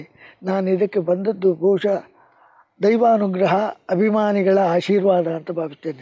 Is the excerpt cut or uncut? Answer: uncut